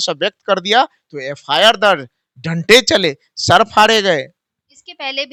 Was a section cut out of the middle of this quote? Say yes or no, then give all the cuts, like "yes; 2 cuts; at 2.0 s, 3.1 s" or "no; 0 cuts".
no; 0 cuts